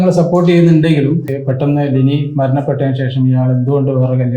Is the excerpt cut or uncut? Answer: cut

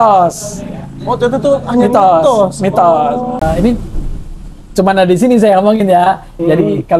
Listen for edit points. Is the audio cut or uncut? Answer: cut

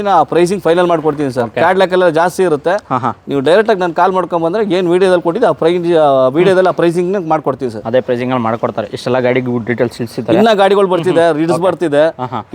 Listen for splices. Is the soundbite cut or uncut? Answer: uncut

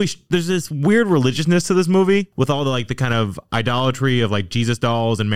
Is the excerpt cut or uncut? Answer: uncut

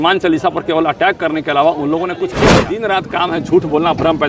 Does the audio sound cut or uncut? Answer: cut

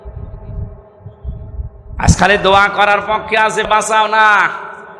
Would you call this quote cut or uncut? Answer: cut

